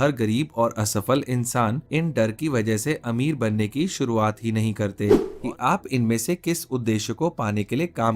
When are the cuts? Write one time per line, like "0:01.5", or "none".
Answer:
0:01.8
0:05.3